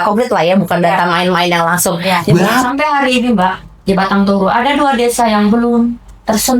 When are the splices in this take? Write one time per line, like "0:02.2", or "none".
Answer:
0:02.3